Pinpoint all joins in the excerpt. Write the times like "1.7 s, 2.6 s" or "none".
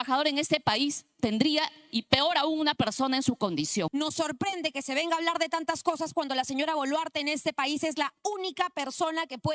3.9 s